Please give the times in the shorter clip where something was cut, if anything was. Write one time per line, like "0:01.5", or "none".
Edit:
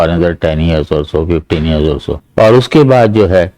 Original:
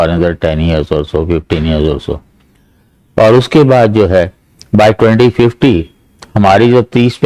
0:02.2